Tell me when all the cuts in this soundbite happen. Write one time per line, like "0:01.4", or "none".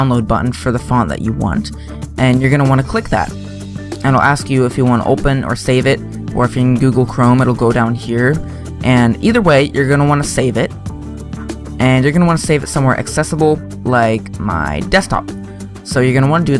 0:04.8